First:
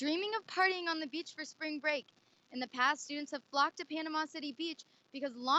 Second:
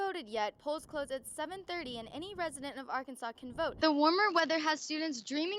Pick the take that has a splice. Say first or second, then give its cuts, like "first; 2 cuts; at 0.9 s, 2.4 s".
second; 1 cut; at 3.8 s